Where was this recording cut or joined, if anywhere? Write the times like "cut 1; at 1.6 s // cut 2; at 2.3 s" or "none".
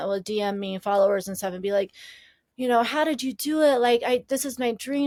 none